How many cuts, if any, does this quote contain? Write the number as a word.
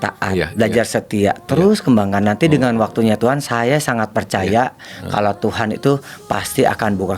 zero